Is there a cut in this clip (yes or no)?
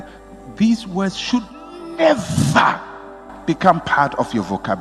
no